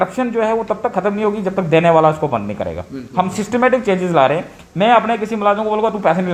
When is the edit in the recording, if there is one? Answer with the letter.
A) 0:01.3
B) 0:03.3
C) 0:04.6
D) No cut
D